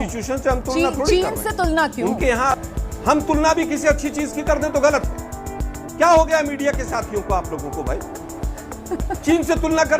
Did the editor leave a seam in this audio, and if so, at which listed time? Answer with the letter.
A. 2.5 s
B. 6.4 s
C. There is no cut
A